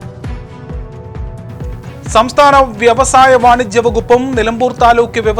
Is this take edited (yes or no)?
yes